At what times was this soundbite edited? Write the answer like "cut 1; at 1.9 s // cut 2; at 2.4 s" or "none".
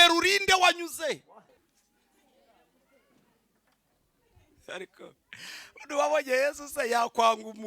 cut 1; at 1.5 s